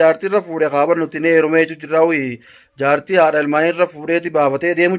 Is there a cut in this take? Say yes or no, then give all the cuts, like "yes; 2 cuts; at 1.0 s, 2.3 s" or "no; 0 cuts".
no; 0 cuts